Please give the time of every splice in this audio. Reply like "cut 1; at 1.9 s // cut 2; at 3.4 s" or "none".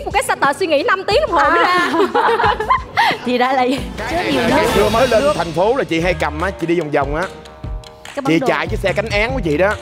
cut 1; at 4.1 s